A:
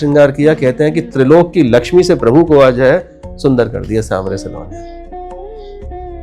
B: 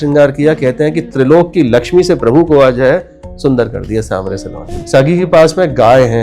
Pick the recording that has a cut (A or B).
B